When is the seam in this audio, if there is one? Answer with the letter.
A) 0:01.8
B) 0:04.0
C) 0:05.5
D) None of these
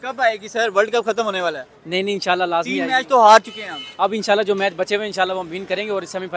D